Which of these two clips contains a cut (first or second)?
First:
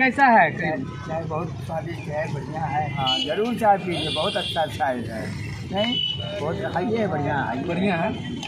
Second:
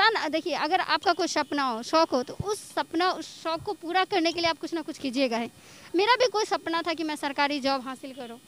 first